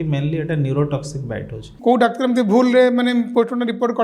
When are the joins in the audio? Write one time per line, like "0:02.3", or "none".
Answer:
0:01.7